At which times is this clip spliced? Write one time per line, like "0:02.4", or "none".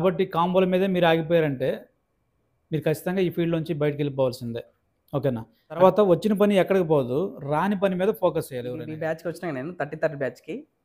0:05.8
0:08.9